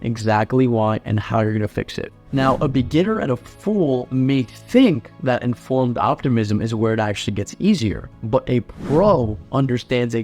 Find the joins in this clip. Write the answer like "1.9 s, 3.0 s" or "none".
none